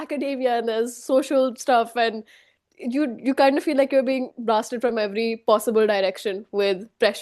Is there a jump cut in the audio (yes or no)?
no